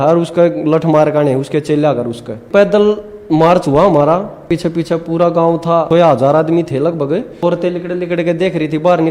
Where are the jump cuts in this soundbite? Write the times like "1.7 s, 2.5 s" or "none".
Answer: 2.5 s, 4.5 s, 5.9 s, 7.4 s